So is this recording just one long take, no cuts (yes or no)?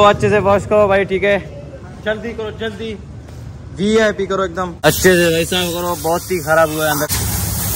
no